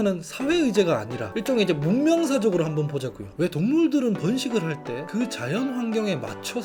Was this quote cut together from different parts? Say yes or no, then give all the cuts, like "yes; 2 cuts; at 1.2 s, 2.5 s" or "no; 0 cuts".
no; 0 cuts